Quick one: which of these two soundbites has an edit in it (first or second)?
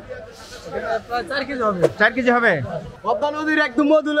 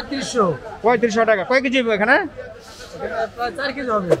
first